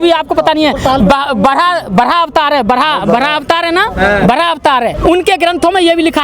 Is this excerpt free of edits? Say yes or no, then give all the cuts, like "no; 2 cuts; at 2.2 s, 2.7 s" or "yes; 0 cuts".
no; 1 cut; at 4.9 s